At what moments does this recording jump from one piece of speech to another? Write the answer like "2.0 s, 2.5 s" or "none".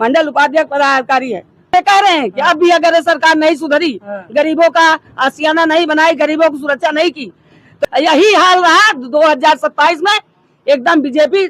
1.7 s, 7.7 s